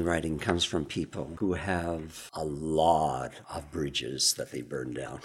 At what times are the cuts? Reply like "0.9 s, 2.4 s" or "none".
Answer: 1.3 s, 2.2 s, 3.4 s